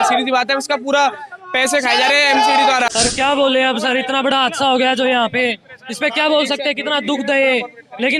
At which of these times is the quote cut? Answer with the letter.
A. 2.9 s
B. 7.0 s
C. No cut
A